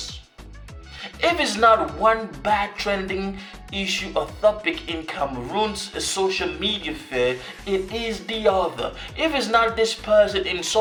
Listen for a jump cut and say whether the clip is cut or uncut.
uncut